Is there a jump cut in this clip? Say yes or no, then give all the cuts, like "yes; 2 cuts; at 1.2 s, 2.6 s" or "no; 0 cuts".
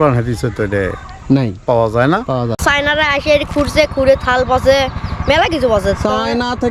yes; 1 cut; at 2.6 s